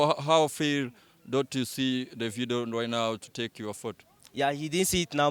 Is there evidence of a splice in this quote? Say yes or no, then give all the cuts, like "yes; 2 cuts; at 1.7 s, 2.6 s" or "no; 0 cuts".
no; 0 cuts